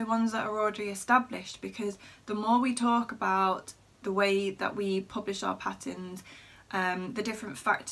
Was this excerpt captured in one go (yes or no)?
yes